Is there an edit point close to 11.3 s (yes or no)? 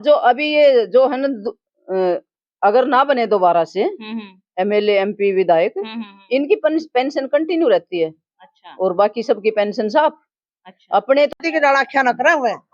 yes